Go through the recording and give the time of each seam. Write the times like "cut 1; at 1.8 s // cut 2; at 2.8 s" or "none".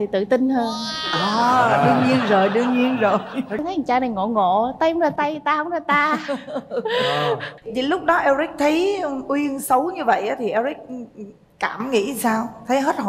cut 1; at 3.6 s // cut 2; at 7.5 s